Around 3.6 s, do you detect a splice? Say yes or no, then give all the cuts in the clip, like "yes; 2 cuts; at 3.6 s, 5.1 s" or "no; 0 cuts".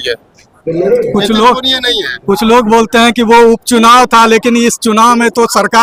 no; 0 cuts